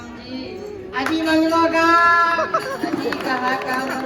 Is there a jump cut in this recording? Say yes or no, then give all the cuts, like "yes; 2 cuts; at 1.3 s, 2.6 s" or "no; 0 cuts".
no; 0 cuts